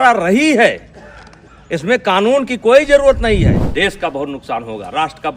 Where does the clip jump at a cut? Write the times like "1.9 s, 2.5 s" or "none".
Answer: 3.6 s